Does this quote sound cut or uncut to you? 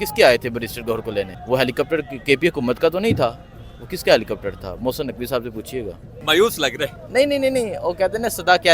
cut